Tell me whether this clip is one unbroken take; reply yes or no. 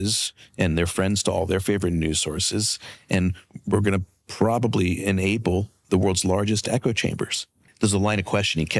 no